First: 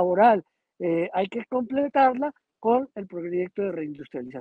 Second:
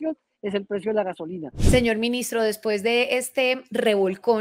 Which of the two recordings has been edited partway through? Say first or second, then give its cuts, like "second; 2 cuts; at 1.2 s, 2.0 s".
second; 1 cut; at 1.5 s